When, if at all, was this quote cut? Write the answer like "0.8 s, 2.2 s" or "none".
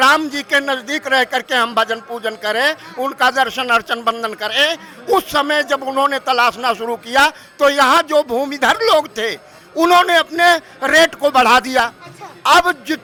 none